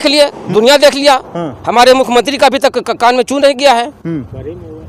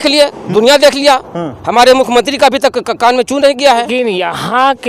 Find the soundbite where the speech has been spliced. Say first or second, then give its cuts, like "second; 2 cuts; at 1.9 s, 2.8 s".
second; 1 cut; at 3.9 s